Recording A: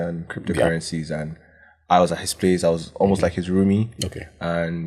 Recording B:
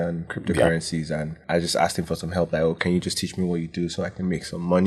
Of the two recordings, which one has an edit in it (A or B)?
B